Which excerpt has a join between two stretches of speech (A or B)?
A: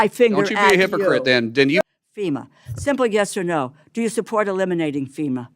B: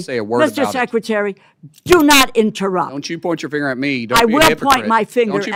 A